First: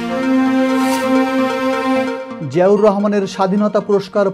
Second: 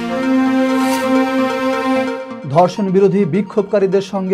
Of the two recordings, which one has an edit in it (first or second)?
first